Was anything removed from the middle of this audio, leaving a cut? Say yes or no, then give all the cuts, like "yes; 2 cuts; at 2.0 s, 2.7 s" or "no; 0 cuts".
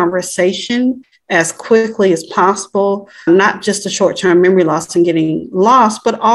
yes; 2 cuts; at 1.1 s, 3.2 s